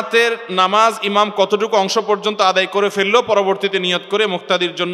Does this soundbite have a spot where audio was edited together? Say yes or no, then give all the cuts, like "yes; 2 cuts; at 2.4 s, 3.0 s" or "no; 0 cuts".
no; 0 cuts